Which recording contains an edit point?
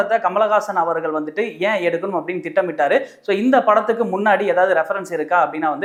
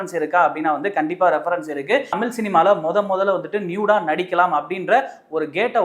second; 1 cut; at 2.2 s

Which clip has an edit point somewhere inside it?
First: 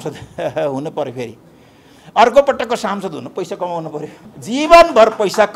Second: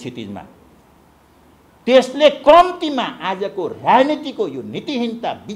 first; 1 cut; at 4.3 s

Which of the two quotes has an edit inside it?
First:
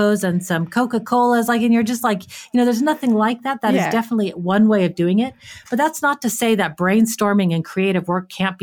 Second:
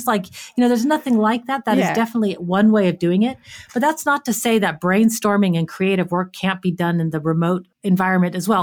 second; 1 cut; at 7.7 s

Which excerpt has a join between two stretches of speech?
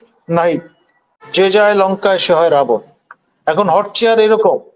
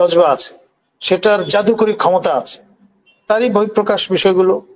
first; 1 cut; at 1.1 s

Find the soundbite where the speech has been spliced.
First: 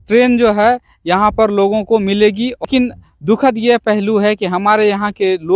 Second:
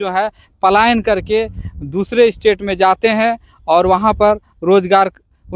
first; 1 cut; at 2.6 s

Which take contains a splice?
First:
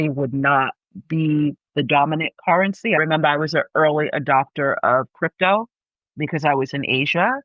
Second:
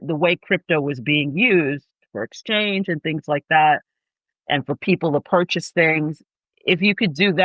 first; 1 cut; at 3.0 s

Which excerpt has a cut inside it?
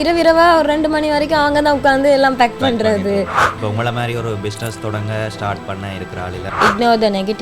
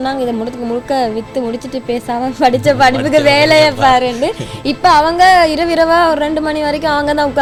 first; 2 cuts; at 3.5 s, 6.5 s

